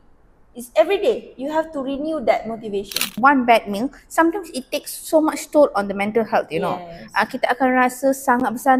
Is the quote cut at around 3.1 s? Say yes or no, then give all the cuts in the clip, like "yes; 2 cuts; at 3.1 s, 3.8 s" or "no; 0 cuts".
yes; 1 cut; at 3.1 s